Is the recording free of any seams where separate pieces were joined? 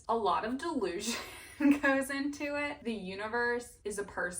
no; 1 cut; at 2.8 s

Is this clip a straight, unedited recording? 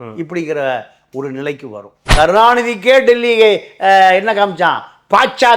no; 1 cut; at 2.0 s

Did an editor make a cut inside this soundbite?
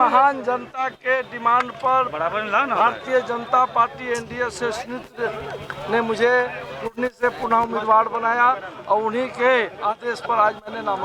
no; 0 cuts

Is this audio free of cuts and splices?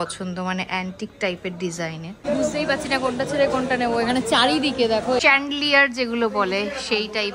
no; 2 cuts; at 2.2 s, 5.2 s

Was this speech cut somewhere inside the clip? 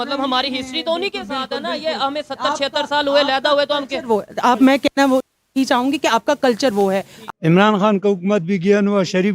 yes; 1 cut; at 7.1 s

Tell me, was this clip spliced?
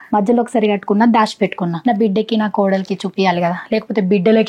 no; 0 cuts

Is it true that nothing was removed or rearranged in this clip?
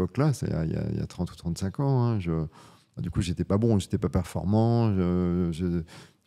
yes; 0 cuts

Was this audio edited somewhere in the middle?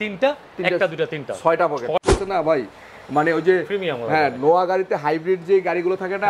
yes; 1 cut; at 2.0 s

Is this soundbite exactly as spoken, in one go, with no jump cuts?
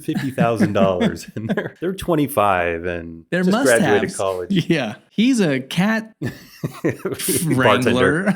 yes; 0 cuts

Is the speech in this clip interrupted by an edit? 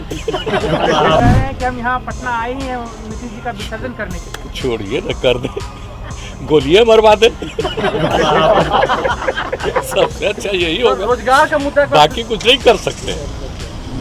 yes; 1 cut; at 1.2 s

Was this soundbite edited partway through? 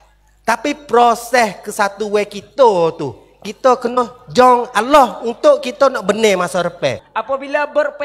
yes; 1 cut; at 7.0 s

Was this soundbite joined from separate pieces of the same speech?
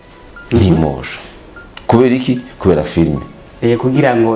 no; 0 cuts

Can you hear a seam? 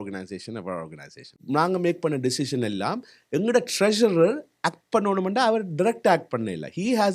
yes; 1 cut; at 1.4 s

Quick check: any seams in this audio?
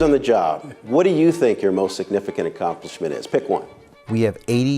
yes; 1 cut; at 3.8 s

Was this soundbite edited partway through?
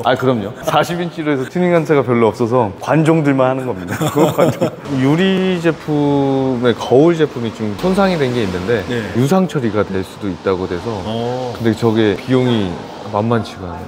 yes; 1 cut; at 4.9 s

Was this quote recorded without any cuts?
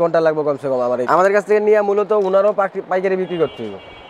no; 1 cut; at 1.0 s

